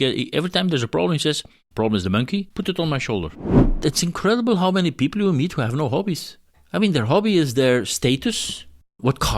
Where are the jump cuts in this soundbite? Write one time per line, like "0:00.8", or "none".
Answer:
0:03.8